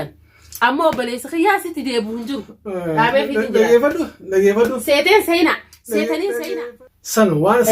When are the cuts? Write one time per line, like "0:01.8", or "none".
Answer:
0:06.7